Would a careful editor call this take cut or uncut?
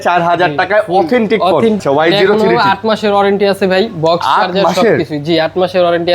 cut